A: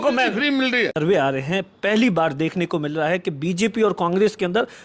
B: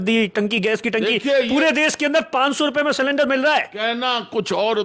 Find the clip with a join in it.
A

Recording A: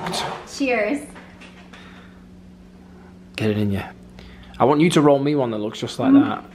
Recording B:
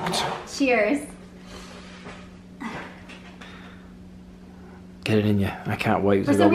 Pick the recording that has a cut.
A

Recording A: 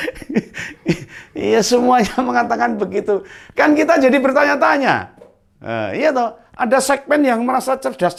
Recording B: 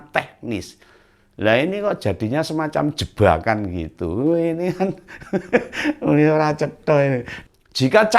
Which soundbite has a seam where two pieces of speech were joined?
B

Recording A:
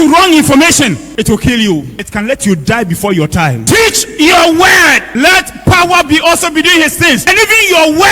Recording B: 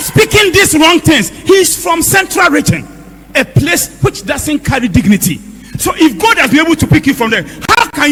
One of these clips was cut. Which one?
A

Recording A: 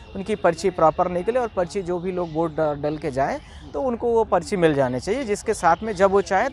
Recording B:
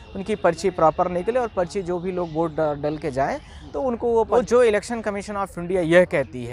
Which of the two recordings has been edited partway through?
B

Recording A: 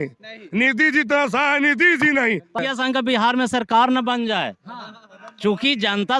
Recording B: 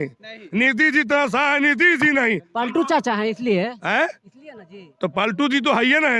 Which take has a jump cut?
A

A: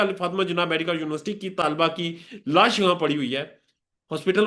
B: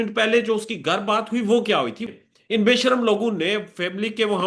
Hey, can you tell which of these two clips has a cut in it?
B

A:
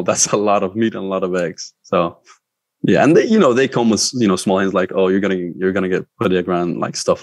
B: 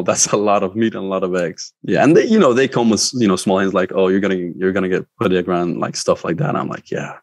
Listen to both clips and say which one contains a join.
B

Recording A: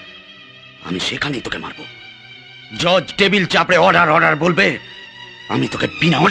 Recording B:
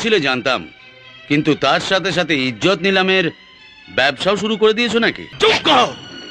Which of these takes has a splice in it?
B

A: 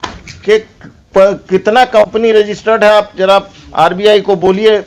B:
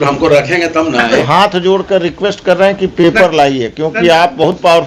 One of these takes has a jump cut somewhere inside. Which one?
B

